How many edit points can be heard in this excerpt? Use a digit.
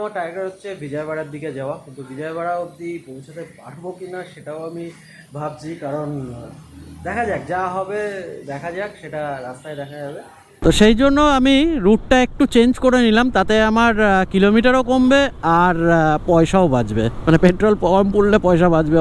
1